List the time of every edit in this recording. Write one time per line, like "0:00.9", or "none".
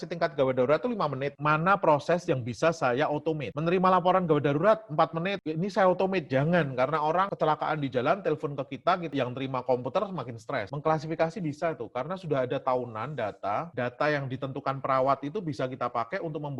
0:01.3
0:07.3
0:10.7